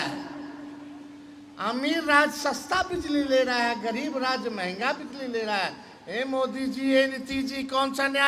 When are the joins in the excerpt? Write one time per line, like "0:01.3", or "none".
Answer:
none

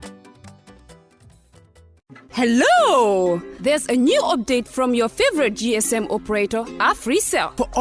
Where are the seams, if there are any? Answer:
0:01.9

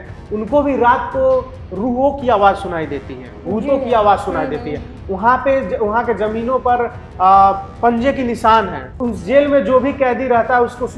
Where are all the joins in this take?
0:09.1

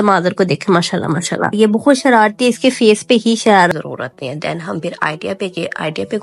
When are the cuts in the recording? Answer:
0:03.7

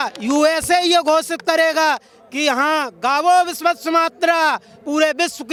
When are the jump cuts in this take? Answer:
none

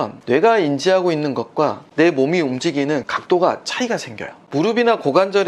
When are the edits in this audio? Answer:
0:01.8
0:03.0
0:04.4

